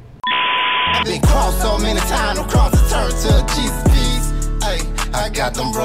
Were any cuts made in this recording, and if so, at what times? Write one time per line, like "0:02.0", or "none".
0:01.0